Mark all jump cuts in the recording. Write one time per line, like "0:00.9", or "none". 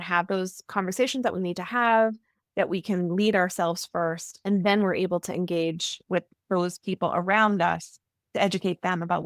none

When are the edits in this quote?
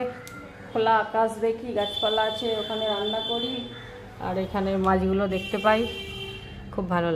none

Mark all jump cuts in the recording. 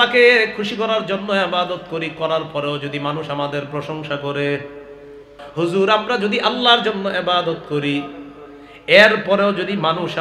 0:05.4

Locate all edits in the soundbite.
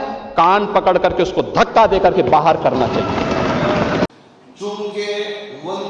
0:04.1

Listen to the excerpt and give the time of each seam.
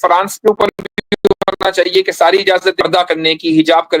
0:02.8

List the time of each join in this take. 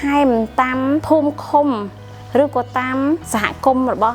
0:01.0
0:03.3

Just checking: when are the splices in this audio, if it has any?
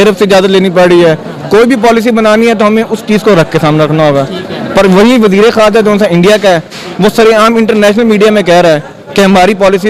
none

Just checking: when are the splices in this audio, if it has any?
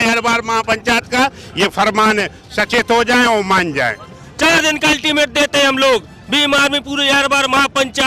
0:04.2

